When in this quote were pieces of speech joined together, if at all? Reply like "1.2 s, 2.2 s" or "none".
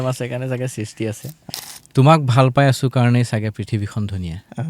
1.3 s